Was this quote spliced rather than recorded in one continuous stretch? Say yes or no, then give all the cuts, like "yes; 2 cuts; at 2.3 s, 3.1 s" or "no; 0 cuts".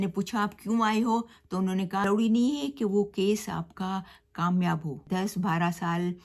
yes; 2 cuts; at 2.0 s, 5.0 s